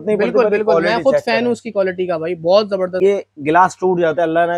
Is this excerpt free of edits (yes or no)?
no